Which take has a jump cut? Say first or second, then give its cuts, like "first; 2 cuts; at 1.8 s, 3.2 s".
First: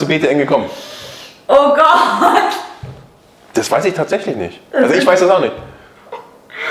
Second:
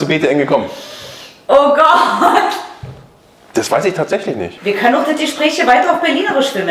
second; 1 cut; at 4.5 s